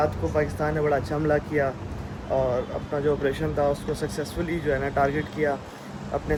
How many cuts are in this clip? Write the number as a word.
zero